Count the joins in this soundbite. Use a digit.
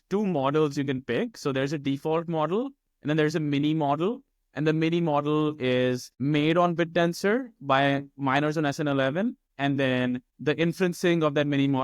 3